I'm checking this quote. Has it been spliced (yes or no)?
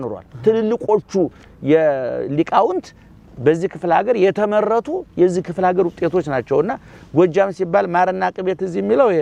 no